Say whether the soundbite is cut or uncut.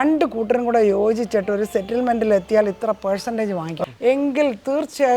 cut